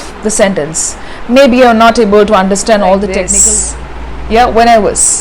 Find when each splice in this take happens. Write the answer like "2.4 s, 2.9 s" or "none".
3.3 s